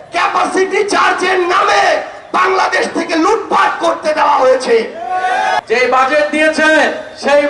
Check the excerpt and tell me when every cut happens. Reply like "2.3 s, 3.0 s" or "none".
5.6 s